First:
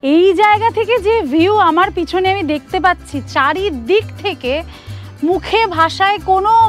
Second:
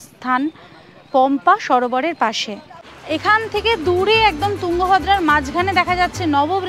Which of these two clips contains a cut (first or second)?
second